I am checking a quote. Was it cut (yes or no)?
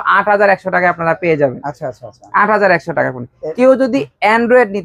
no